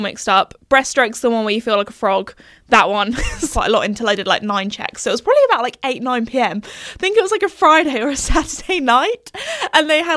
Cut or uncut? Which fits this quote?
cut